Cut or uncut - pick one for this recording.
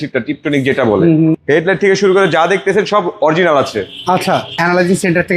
cut